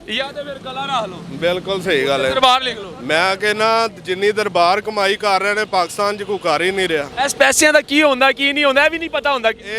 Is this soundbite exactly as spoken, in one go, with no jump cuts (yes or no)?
no